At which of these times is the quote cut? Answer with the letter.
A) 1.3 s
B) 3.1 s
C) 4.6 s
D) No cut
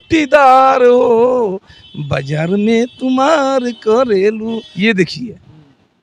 D